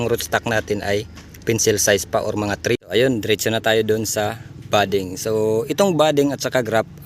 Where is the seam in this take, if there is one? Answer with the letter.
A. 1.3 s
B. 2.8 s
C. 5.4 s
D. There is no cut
B